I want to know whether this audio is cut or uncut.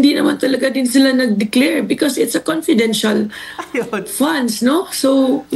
uncut